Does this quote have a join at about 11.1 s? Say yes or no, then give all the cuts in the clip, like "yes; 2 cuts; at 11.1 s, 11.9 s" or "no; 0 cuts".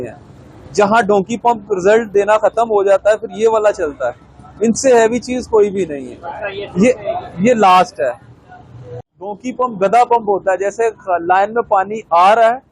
no; 1 cut; at 8.9 s